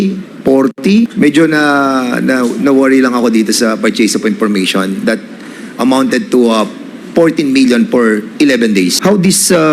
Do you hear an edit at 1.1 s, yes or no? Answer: yes